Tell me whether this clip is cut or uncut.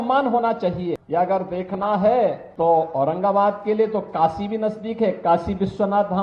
cut